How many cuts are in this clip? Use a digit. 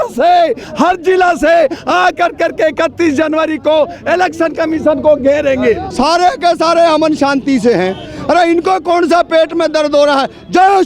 1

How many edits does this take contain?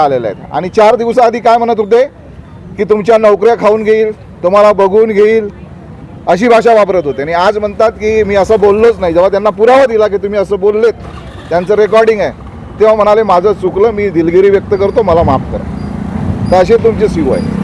0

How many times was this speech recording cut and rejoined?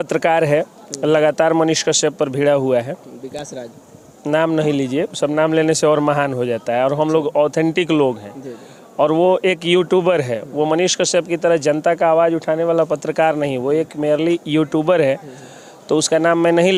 0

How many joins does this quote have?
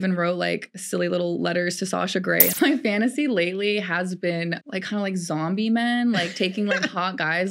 2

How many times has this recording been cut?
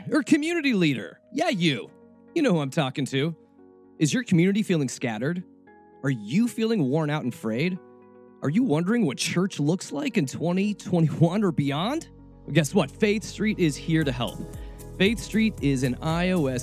1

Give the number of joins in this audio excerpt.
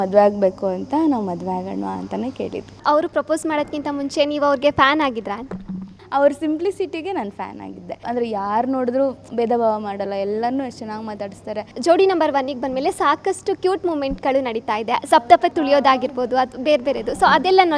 5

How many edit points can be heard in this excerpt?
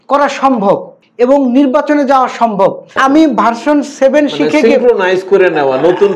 2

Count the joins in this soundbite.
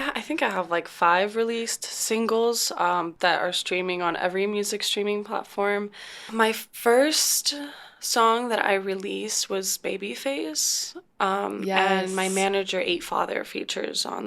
2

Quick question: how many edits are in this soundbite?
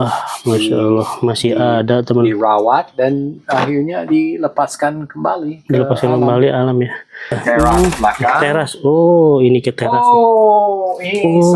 1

